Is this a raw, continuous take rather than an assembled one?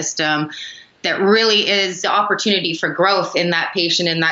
no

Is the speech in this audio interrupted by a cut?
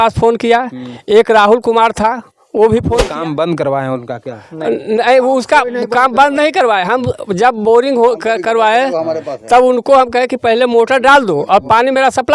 yes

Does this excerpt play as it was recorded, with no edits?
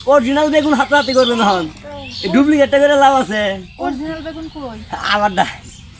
yes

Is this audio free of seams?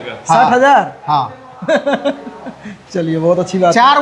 yes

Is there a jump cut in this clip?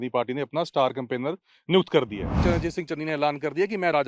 yes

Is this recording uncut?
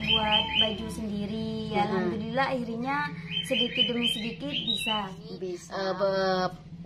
no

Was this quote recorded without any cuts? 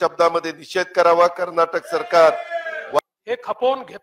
no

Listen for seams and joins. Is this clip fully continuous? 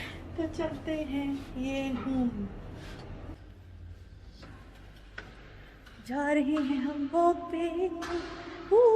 no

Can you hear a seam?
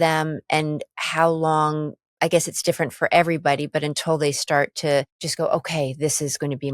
yes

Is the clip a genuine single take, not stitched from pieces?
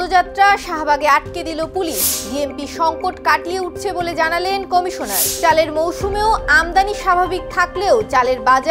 yes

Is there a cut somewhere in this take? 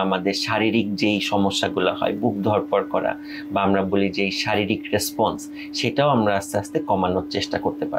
no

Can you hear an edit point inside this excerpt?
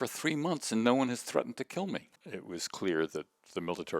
yes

